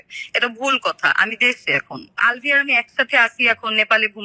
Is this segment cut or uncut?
cut